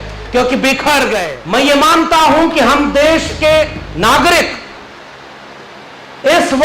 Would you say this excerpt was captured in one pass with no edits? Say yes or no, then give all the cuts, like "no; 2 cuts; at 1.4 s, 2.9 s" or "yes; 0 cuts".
no; 1 cut; at 1.3 s